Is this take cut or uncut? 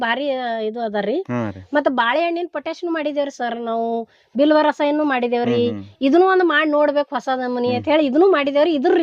uncut